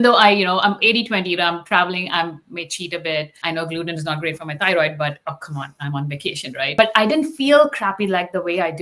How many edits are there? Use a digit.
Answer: 2